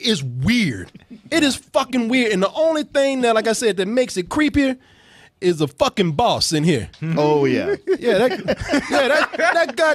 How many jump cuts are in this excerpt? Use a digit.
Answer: 0